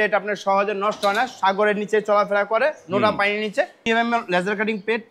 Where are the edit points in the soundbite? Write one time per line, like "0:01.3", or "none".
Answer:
0:03.8